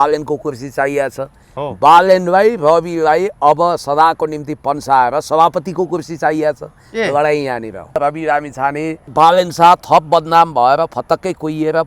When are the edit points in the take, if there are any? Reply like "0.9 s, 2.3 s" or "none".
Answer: 8.0 s, 9.0 s